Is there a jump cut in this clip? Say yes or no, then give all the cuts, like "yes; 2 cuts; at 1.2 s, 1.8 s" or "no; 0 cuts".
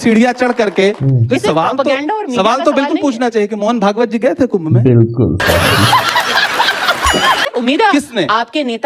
yes; 2 cuts; at 1.0 s, 7.9 s